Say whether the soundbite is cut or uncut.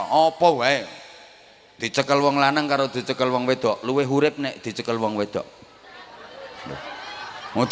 uncut